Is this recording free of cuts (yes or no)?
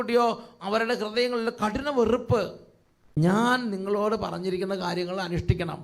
no